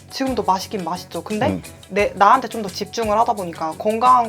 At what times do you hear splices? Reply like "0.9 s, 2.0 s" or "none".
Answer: none